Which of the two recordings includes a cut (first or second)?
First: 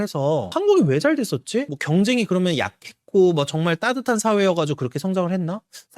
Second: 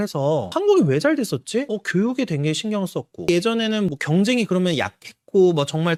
first